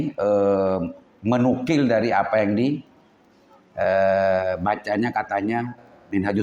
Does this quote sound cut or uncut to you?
uncut